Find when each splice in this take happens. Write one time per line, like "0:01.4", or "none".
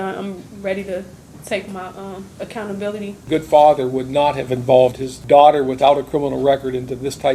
0:02.3
0:03.2
0:05.1